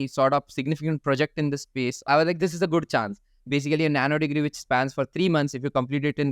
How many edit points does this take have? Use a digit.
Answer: 2